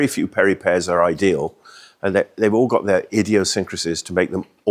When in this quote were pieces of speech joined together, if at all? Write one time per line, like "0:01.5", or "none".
none